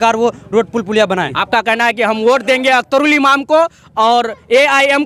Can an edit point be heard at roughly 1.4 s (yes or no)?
yes